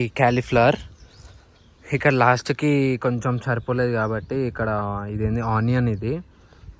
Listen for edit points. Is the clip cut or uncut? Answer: uncut